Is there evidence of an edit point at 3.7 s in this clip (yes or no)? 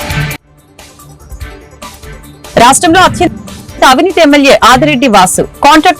no